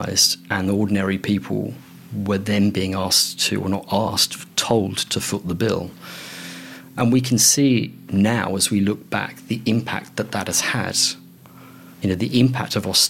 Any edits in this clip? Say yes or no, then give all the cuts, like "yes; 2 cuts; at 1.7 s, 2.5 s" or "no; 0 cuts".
no; 0 cuts